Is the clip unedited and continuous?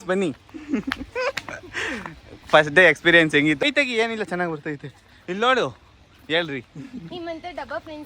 no; 1 cut; at 3.6 s

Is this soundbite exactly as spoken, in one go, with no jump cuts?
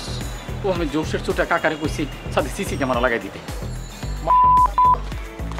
yes; 0 cuts

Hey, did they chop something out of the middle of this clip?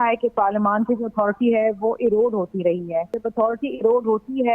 yes; 1 cut; at 3.2 s

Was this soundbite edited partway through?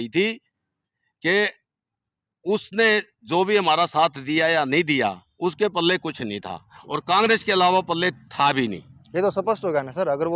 no; 0 cuts

